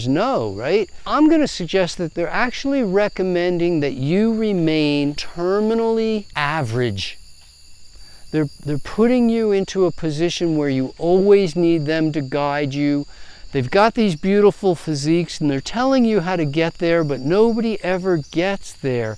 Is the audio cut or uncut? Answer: cut